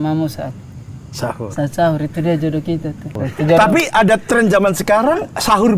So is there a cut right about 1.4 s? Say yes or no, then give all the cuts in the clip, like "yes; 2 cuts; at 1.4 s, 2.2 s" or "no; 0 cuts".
no; 1 cut; at 3.2 s